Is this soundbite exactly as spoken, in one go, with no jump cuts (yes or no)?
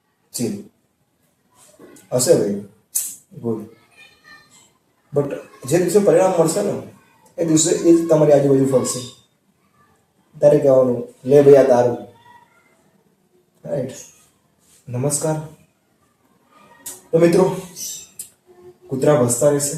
yes